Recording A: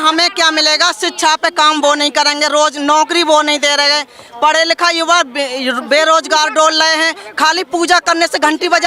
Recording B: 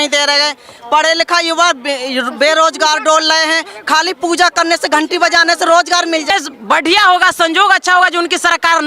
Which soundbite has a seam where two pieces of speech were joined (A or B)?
B